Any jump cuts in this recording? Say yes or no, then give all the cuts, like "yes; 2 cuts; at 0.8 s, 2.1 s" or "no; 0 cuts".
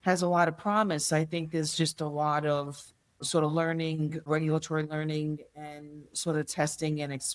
yes; 1 cut; at 3.2 s